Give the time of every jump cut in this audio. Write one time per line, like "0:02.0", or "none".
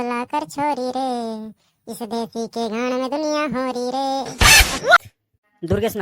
0:05.0